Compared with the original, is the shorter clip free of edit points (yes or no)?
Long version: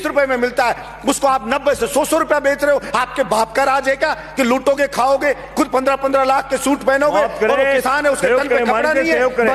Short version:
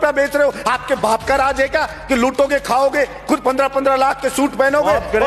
yes